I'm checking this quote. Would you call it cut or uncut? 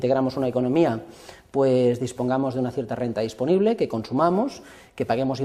cut